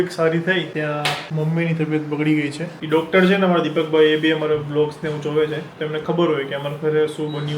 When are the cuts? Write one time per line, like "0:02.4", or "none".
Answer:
0:01.0
0:02.8